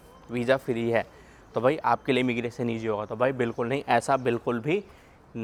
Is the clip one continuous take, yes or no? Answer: yes